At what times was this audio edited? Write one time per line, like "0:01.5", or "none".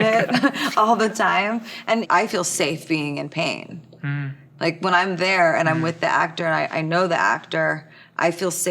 0:02.0